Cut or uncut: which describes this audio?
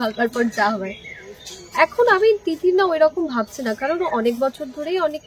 uncut